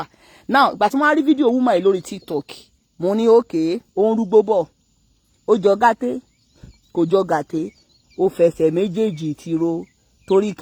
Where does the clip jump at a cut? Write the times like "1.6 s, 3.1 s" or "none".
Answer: none